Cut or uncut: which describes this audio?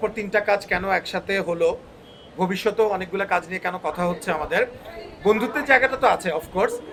uncut